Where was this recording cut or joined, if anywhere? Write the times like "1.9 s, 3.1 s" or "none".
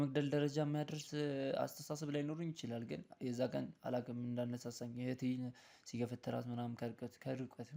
none